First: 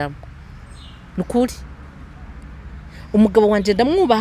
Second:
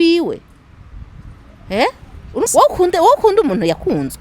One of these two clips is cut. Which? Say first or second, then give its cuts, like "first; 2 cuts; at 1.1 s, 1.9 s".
second; 1 cut; at 2.5 s